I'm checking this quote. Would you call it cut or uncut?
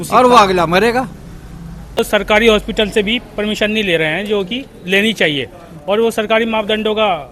cut